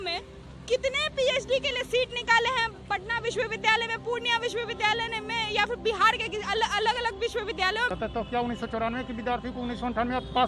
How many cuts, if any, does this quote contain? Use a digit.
1